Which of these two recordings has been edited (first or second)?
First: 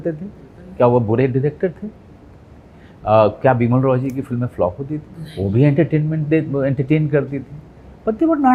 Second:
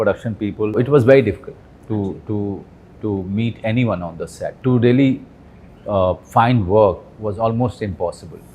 second